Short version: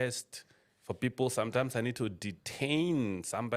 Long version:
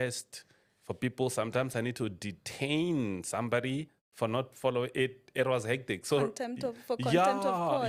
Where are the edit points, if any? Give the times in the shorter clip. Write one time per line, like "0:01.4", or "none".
none